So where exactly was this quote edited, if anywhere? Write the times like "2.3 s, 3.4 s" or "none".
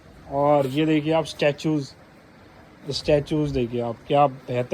none

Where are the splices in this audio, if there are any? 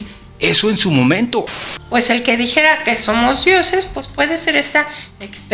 1.5 s

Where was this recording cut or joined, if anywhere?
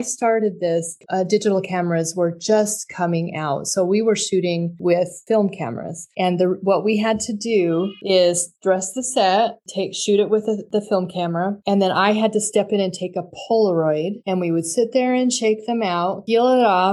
none

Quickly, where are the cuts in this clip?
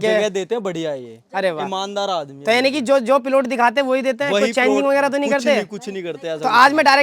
none

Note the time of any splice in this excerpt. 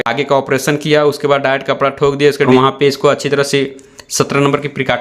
2.5 s

